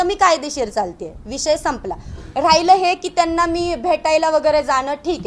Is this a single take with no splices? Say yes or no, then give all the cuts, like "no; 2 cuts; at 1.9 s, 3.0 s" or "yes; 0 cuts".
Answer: yes; 0 cuts